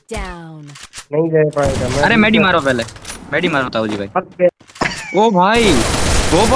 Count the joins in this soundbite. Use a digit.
1